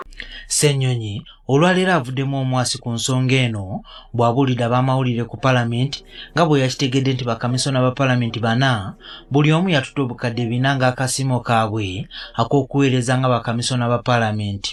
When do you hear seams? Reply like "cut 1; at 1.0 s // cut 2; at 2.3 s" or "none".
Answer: none